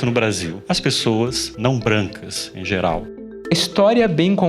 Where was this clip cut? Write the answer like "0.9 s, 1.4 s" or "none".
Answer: 3.5 s

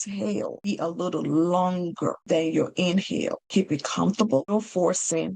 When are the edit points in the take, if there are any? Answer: 0.7 s, 2.2 s, 3.4 s, 4.5 s

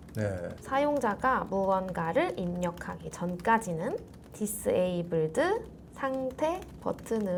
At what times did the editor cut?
none

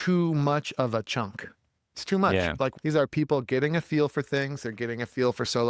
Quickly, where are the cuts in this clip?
none

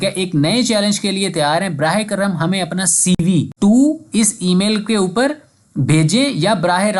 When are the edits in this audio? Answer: 3.5 s

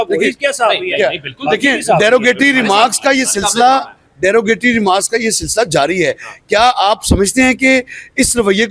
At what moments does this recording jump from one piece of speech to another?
none

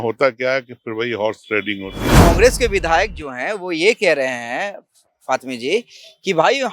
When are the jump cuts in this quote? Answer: 2.1 s

